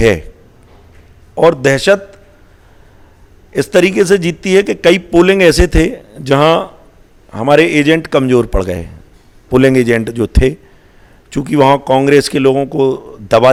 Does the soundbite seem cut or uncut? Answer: uncut